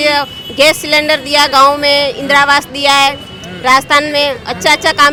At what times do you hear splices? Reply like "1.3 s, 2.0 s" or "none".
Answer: none